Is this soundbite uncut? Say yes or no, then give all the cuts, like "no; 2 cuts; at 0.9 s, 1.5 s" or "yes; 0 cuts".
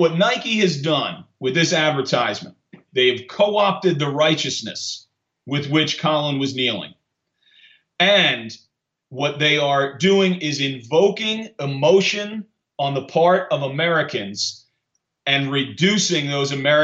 no; 1 cut; at 2.8 s